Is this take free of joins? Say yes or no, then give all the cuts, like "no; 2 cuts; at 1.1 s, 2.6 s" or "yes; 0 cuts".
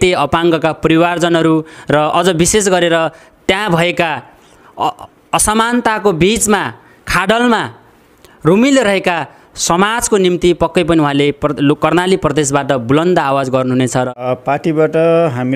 no; 1 cut; at 14.2 s